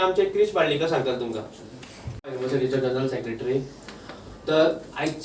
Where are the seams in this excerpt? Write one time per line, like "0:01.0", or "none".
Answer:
0:02.3